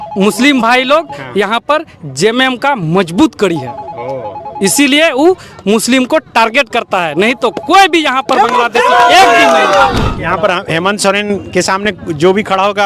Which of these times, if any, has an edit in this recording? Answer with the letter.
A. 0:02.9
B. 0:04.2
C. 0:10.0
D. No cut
C